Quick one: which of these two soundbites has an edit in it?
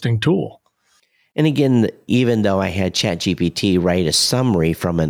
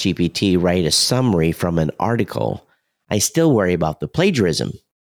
first; 1 cut; at 2.0 s

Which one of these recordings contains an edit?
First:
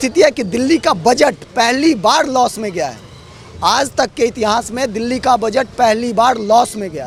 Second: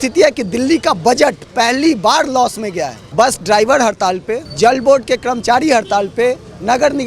second; 2 cuts; at 3.0 s, 4.4 s

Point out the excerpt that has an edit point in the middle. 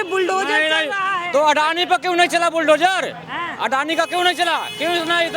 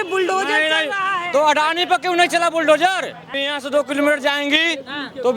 second; 1 cut; at 3.4 s

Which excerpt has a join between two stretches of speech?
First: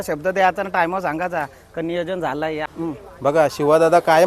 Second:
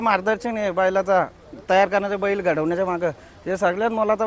first; 1 cut; at 2.7 s

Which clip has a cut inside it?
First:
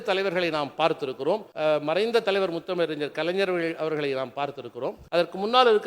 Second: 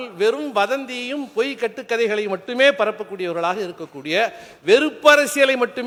first; 2 cuts; at 1.5 s, 5.0 s

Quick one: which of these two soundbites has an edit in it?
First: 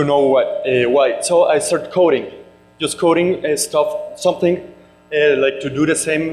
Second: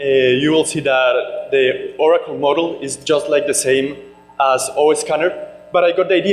second; 1 cut; at 5.0 s

